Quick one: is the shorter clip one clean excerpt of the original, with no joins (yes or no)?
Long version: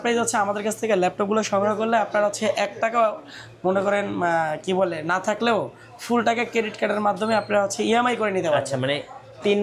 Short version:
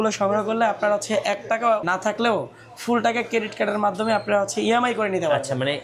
no